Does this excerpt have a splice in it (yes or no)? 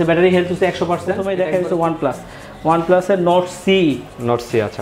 yes